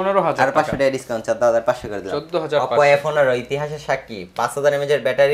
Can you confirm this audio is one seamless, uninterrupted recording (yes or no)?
yes